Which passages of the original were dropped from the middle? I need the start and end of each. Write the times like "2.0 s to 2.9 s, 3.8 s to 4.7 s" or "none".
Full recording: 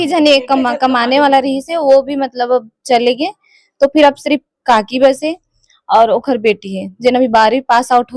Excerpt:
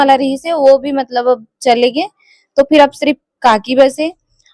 none